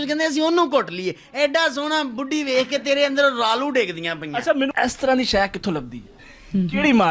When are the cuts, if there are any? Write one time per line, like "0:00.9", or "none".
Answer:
0:04.7